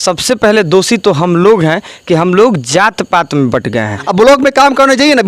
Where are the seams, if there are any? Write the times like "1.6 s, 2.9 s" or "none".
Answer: 4.0 s